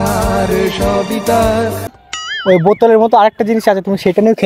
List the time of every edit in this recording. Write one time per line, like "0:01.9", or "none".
0:01.9